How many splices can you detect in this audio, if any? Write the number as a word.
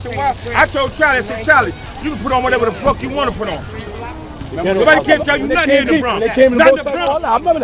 one